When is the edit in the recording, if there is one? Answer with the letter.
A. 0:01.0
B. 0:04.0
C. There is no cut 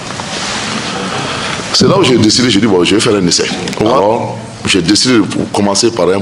B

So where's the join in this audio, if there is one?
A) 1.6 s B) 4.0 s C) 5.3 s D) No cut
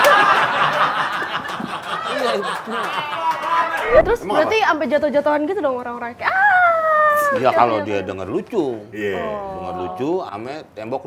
B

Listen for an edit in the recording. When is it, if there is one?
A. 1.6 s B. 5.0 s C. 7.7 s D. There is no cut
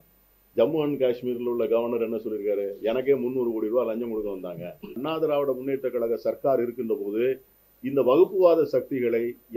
B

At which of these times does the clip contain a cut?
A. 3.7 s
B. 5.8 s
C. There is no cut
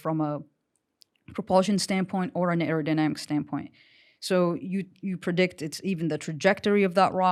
C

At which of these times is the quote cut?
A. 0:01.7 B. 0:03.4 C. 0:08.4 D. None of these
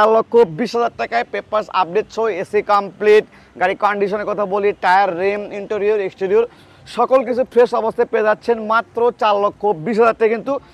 D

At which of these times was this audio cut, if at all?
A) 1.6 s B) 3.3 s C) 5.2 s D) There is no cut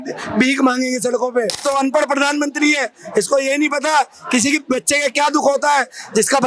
A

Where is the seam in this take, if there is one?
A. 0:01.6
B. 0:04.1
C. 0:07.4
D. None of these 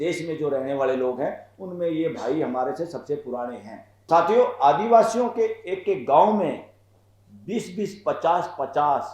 B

